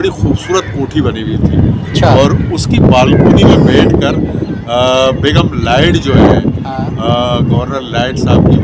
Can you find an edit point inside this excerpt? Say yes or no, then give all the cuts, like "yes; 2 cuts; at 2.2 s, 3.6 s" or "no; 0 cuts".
no; 0 cuts